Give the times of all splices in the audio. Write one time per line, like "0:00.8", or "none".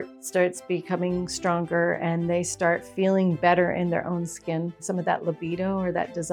0:04.8